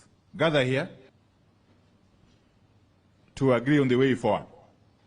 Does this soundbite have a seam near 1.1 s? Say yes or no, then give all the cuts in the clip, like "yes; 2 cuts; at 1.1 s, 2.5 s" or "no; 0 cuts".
yes; 1 cut; at 1.1 s